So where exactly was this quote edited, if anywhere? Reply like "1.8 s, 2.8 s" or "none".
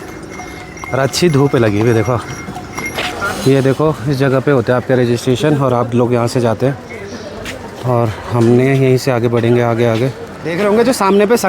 2.7 s, 10.4 s